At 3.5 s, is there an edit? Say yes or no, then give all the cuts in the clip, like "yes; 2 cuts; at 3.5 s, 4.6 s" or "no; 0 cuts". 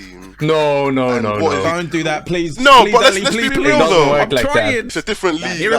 yes; 2 cuts; at 3.5 s, 4.9 s